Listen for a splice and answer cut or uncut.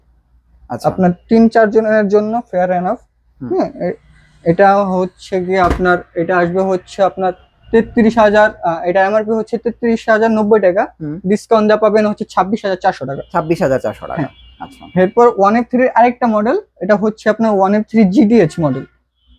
uncut